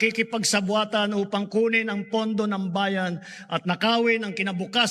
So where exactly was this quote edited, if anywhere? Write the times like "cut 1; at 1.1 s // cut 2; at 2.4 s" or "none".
none